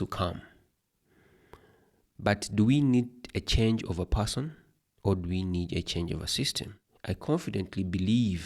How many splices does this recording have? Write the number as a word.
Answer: one